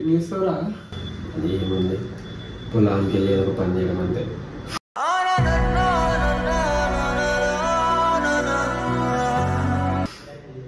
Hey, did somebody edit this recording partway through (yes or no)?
no